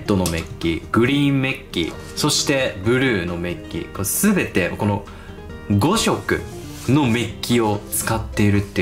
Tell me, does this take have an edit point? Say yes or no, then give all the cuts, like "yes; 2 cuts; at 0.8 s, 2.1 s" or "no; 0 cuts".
no; 0 cuts